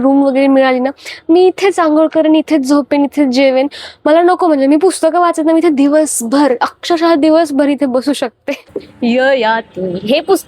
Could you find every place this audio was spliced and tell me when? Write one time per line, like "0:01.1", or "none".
0:08.8